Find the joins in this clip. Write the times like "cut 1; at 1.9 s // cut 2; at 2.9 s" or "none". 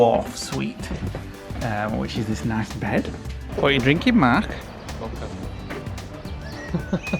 cut 1; at 3.4 s